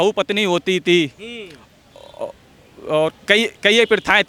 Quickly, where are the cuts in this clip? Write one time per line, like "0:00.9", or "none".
none